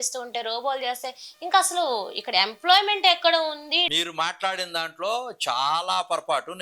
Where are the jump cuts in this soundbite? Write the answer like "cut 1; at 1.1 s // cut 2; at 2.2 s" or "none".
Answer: cut 1; at 3.8 s